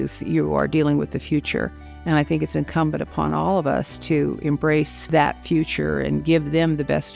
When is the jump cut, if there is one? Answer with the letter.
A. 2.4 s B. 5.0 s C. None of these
B